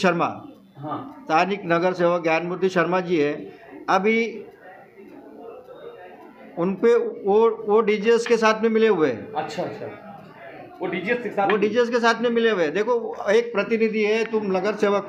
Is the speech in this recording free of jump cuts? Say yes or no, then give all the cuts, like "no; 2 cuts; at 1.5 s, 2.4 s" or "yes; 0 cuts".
yes; 0 cuts